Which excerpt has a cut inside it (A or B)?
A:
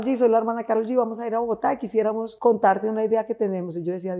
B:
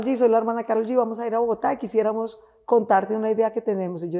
A